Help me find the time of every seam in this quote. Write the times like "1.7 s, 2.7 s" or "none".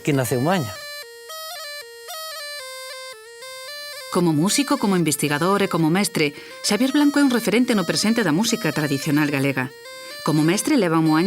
6.7 s